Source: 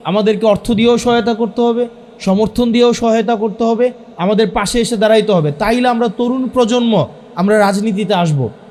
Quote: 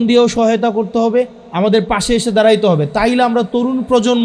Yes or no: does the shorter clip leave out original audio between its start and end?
no